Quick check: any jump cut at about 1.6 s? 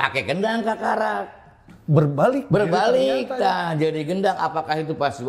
no; 0 cuts

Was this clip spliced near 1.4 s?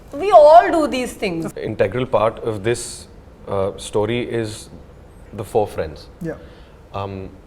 yes; 1 cut; at 1.4 s

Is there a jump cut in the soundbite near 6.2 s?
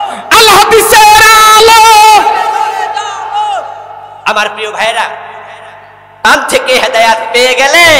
yes; 1 cut; at 6.2 s

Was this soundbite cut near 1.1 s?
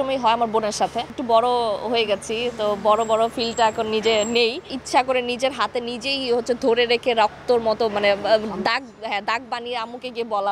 yes; 2 cuts; at 1.1 s, 4.8 s

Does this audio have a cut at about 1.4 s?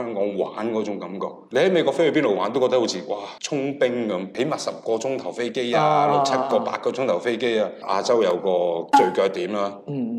yes; 3 cuts; at 1.4 s, 4.3 s, 7.8 s

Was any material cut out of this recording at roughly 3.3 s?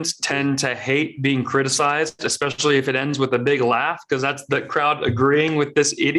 no; 0 cuts

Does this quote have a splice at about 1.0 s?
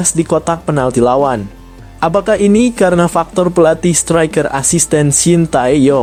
no; 0 cuts

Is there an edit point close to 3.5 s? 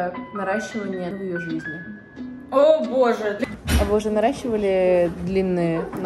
yes; 1 cut; at 3.5 s

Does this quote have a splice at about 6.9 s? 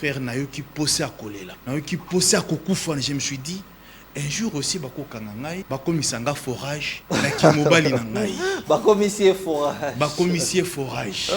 yes; 3 cuts; at 1.5 s, 5.6 s, 6.9 s

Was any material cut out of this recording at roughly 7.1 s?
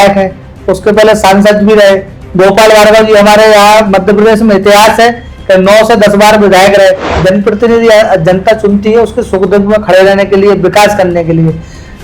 yes; 1 cut; at 7.1 s

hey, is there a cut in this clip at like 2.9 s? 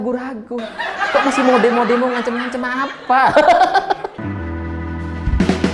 no; 1 cut; at 4.2 s

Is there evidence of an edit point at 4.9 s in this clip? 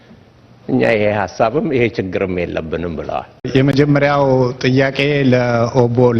no; 1 cut; at 3.5 s

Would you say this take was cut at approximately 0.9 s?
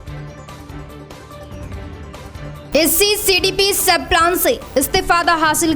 yes; 1 cut; at 0.9 s

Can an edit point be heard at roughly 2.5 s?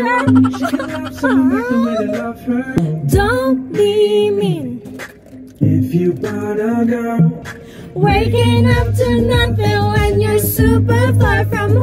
no; 0 cuts

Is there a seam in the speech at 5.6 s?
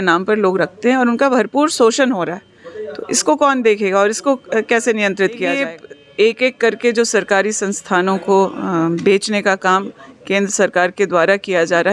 yes; 1 cut; at 5.6 s

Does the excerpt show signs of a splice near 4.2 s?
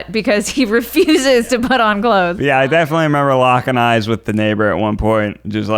no; 1 cut; at 2.3 s

